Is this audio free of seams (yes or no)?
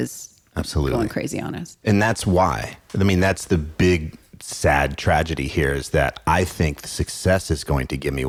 yes